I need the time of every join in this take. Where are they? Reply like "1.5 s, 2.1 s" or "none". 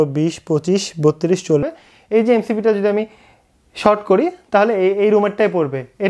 1.6 s